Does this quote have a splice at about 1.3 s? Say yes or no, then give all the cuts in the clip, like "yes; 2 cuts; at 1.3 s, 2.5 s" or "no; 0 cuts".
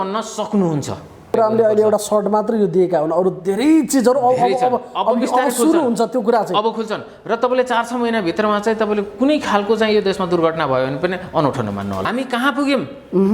yes; 2 cuts; at 1.3 s, 12.1 s